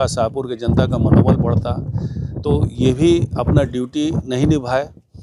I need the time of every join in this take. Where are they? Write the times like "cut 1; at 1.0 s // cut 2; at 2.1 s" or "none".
none